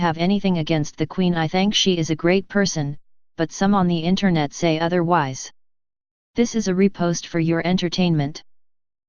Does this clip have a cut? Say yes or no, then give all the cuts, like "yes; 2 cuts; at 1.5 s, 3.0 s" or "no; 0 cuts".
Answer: yes; 1 cut; at 2.2 s